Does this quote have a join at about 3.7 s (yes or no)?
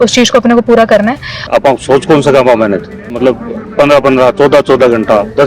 no